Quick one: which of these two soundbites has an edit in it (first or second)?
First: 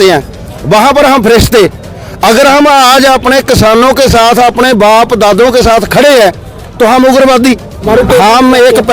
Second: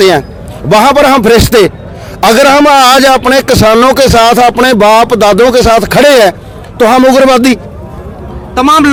first